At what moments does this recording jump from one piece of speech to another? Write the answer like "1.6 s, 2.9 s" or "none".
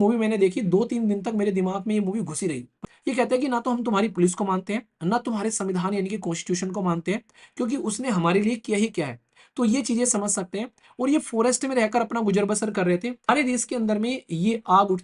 2.8 s, 13.3 s